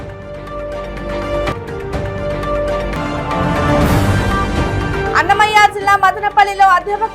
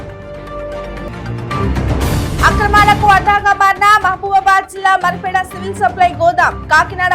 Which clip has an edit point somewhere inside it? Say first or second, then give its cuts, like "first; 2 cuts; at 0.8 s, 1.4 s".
first; 1 cut; at 1.0 s